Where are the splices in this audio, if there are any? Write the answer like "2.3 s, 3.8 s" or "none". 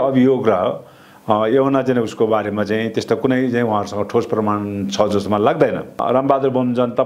6.0 s